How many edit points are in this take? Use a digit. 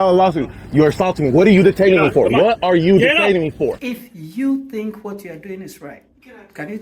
1